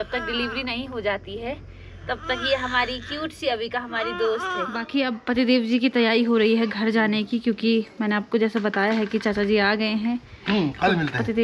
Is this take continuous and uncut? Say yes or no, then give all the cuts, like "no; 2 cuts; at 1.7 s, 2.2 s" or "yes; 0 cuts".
no; 1 cut; at 4.5 s